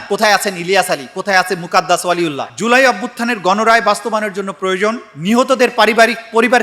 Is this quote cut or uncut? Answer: cut